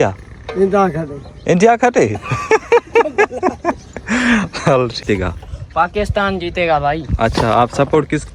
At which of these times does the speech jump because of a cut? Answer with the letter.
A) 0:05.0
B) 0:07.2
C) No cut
A